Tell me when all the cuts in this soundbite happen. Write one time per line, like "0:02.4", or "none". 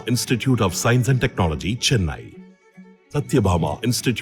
none